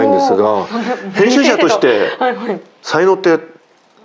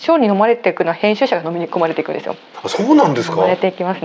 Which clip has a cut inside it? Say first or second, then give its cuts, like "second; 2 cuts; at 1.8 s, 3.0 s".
first; 1 cut; at 2.7 s